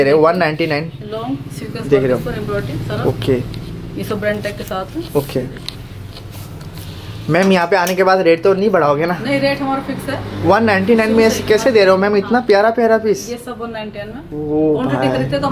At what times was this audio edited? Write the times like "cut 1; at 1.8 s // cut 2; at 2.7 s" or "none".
none